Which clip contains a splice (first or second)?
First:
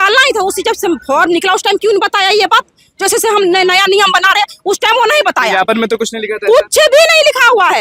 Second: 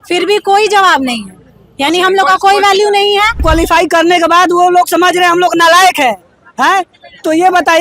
second